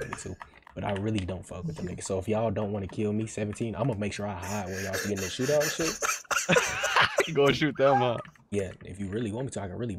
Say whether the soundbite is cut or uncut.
uncut